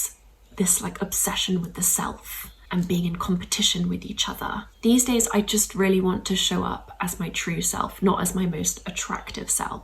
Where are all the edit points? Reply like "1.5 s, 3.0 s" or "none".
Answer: 2.6 s, 4.7 s